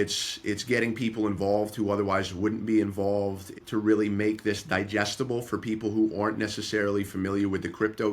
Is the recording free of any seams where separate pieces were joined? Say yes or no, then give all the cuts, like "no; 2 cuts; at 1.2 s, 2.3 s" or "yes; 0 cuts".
no; 1 cut; at 3.5 s